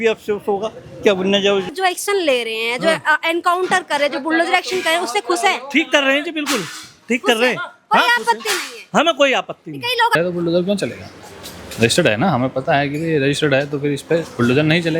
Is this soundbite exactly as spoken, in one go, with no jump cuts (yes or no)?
no